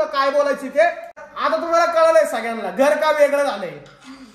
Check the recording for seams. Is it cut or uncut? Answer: cut